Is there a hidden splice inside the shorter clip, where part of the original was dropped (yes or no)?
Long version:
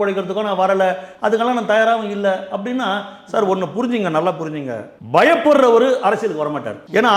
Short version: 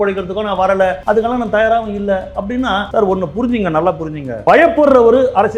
yes